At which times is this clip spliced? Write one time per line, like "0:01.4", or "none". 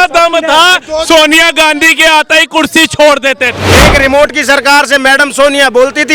0:03.6